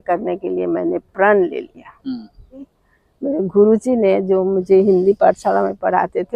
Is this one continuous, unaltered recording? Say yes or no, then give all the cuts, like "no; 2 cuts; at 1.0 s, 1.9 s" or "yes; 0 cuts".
no; 1 cut; at 2.7 s